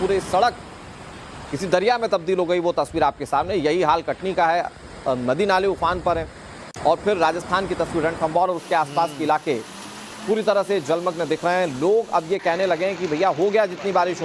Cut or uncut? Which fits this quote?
cut